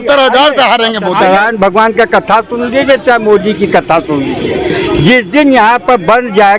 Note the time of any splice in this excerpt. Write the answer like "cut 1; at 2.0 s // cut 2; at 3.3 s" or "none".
cut 1; at 1.2 s